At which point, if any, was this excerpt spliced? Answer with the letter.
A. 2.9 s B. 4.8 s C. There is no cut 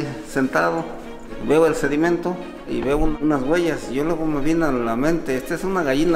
A